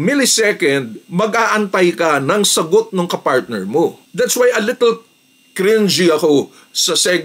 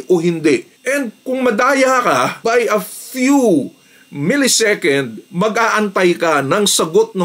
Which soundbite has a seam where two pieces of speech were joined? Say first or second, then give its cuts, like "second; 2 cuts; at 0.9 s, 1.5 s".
first; 1 cut; at 4.0 s